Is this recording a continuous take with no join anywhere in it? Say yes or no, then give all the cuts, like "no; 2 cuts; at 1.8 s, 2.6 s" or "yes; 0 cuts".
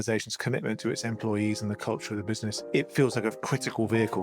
no; 2 cuts; at 2.6 s, 3.4 s